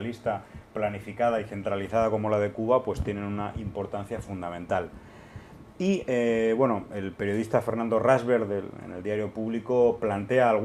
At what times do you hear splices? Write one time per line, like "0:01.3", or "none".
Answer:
none